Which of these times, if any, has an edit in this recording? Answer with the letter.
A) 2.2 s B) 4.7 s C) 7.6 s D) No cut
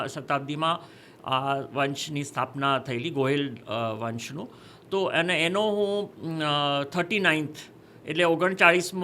D